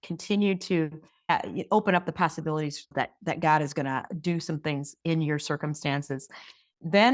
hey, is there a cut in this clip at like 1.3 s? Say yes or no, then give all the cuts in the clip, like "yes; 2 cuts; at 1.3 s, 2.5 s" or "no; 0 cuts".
yes; 1 cut; at 1.3 s